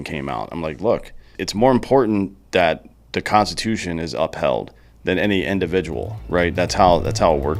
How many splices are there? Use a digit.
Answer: 1